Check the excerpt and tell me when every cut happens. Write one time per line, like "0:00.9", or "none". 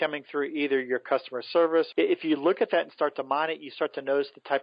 0:01.9

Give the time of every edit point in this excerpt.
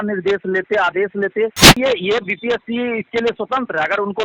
0:01.8

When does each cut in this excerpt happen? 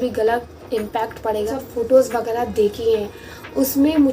0:01.5

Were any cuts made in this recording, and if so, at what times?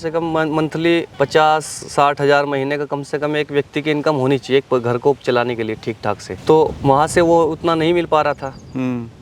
none

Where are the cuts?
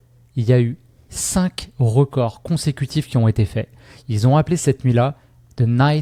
none

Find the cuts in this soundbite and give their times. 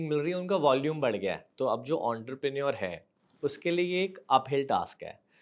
0:01.5

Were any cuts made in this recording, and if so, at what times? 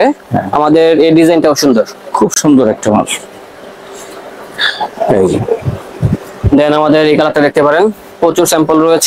none

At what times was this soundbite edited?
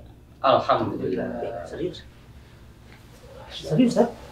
none

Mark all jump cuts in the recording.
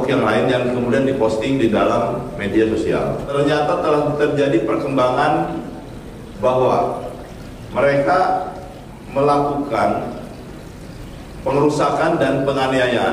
0:03.3

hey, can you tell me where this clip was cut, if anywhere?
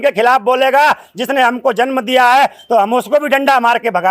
none

